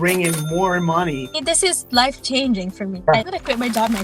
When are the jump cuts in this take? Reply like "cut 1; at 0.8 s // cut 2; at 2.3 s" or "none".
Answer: cut 1; at 1.4 s // cut 2; at 3.1 s